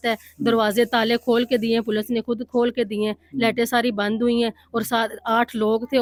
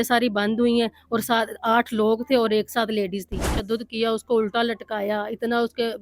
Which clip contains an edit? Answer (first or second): second